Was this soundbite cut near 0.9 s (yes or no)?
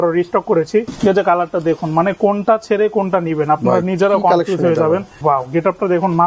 yes